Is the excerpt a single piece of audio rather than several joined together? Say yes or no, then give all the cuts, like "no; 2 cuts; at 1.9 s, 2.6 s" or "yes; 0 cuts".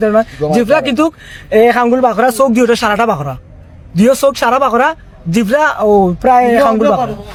yes; 0 cuts